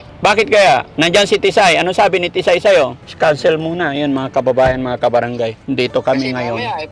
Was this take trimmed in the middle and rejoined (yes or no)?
yes